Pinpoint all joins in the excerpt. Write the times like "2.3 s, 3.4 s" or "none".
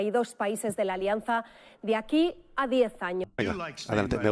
3.2 s